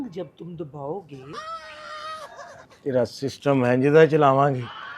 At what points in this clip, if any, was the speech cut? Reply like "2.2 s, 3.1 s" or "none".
2.7 s